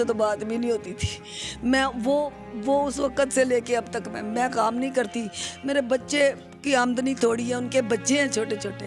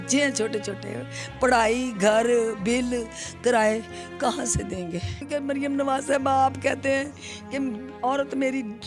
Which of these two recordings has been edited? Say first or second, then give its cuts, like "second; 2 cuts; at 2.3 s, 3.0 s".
second; 1 cut; at 5.2 s